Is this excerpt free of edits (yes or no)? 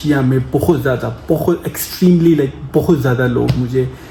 yes